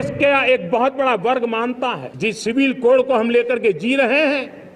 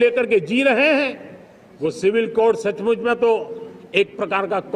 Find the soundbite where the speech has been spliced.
first; 1 cut; at 2.1 s

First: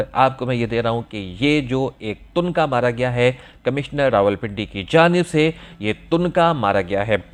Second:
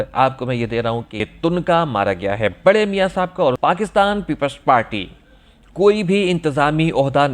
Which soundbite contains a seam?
second; 2 cuts; at 1.2 s, 3.6 s

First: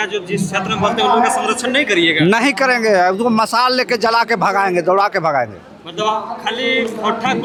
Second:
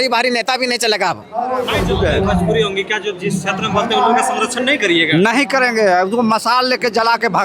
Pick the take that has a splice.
second; 1 cut; at 1.8 s

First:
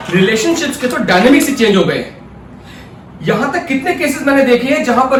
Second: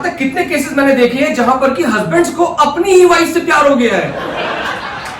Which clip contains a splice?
second; 1 cut; at 4.1 s

